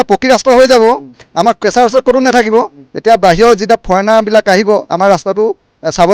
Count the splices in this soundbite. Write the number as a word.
zero